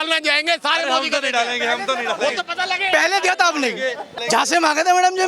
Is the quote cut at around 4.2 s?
yes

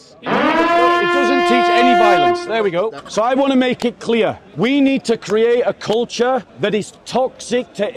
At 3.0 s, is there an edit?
yes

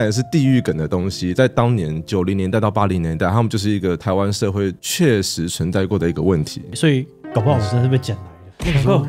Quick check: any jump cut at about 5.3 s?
no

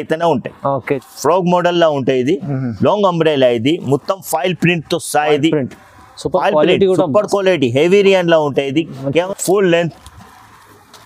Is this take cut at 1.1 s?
yes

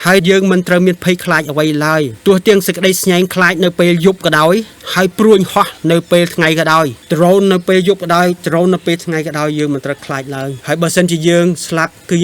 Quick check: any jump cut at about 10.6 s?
yes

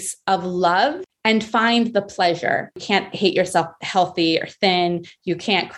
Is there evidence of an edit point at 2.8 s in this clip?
yes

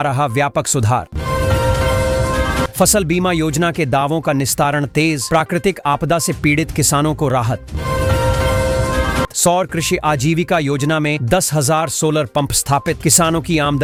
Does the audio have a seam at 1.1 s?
no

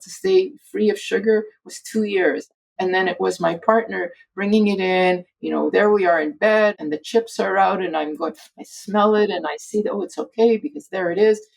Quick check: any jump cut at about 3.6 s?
no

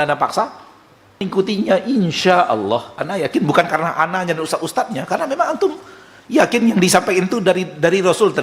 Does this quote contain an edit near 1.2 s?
yes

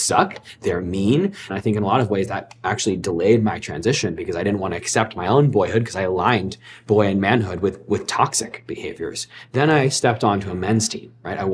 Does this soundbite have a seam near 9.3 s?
no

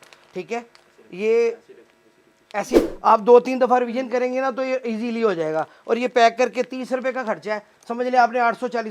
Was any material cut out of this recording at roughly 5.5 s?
no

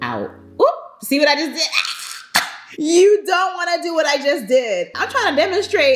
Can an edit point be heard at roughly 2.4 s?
no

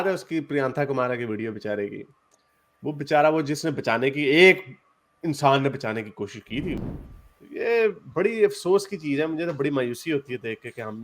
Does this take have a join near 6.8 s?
yes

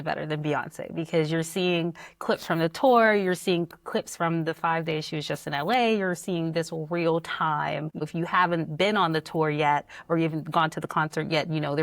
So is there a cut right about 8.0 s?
yes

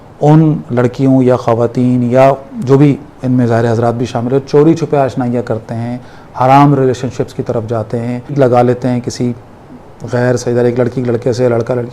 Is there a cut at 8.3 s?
yes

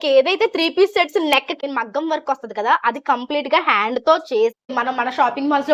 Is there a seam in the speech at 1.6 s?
yes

